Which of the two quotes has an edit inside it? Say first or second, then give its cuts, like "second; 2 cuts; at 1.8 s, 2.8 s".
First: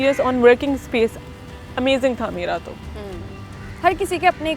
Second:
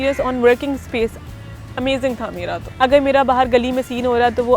second; 1 cut; at 2.6 s